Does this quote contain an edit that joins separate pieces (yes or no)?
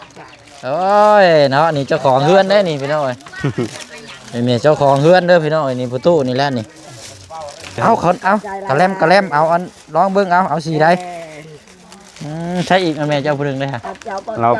yes